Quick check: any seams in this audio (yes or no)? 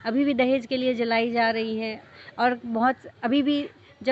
no